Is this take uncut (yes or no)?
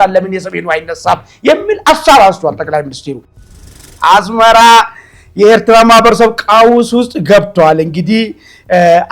no